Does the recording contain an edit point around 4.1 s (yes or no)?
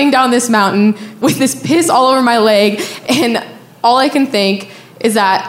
no